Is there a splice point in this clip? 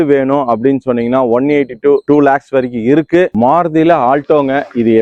no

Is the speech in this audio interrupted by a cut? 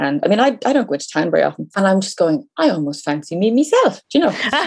yes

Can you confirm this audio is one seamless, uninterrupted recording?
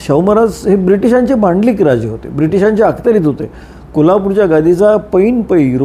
yes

